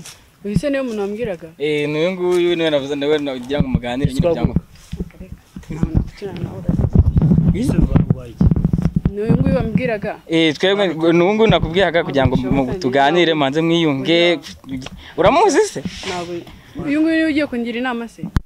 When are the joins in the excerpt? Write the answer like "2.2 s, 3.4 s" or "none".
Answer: none